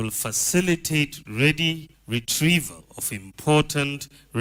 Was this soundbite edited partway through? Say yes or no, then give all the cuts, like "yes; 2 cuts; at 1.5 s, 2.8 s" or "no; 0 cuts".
no; 0 cuts